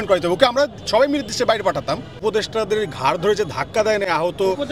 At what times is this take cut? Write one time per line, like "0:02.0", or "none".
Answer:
0:02.1